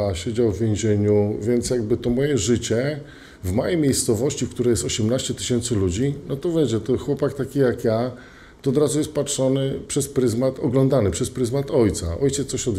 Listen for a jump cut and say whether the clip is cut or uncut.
uncut